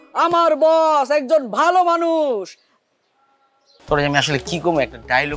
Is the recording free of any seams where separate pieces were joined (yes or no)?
no